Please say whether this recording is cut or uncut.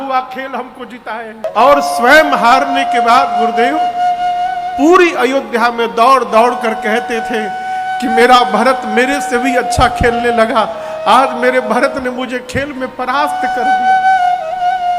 cut